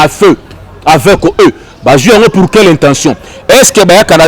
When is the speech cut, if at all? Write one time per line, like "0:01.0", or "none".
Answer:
none